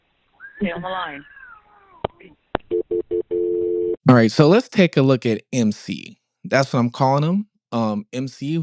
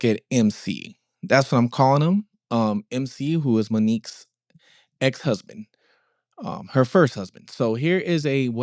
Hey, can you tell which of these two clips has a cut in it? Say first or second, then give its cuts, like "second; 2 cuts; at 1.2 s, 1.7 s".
first; 1 cut; at 3.5 s